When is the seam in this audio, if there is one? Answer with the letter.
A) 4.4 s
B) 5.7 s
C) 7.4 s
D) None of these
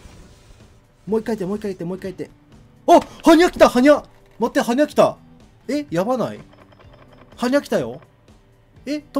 D